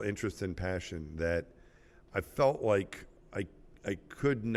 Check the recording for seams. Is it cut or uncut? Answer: uncut